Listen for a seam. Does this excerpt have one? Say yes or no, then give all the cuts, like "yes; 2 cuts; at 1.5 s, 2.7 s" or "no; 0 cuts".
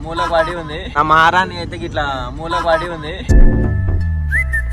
yes; 2 cuts; at 0.9 s, 3.1 s